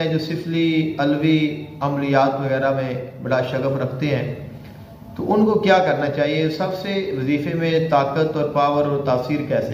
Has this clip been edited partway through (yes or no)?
no